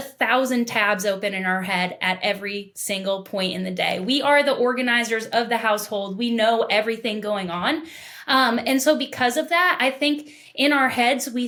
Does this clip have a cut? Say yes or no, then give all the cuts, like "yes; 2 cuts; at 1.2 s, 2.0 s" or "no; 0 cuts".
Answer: no; 0 cuts